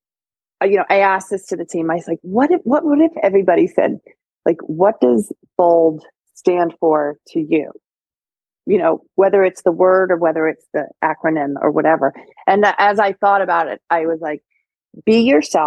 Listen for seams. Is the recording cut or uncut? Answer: uncut